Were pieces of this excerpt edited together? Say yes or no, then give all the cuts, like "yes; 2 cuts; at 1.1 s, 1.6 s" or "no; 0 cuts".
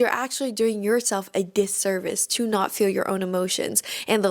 no; 0 cuts